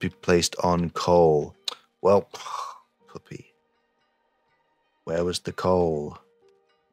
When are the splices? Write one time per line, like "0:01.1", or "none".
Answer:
none

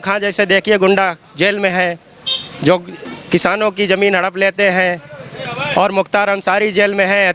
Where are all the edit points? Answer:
none

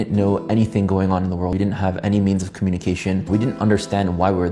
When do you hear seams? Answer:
0:01.5
0:03.2

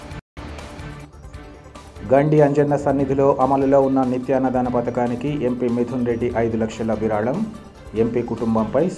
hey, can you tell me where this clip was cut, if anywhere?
0:00.9

